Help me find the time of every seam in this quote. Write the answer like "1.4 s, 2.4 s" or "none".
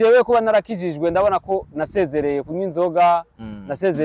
none